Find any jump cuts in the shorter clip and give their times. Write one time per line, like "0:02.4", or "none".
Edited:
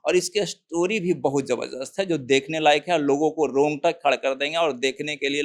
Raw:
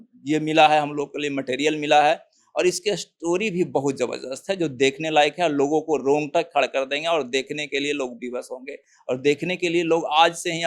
none